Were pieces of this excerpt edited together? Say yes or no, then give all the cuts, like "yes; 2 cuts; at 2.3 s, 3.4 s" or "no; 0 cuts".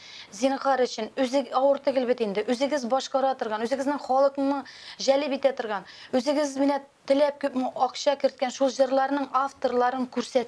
no; 0 cuts